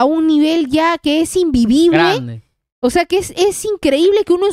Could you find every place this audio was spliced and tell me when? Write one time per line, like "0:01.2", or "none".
none